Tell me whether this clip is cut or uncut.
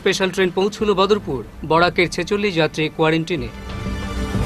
uncut